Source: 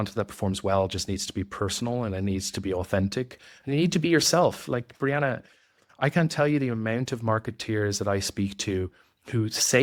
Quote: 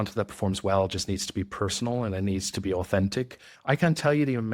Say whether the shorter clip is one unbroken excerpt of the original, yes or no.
no